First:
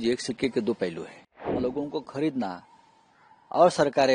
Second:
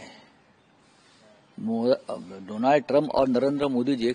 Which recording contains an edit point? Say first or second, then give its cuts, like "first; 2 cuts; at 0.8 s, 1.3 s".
first; 1 cut; at 1.4 s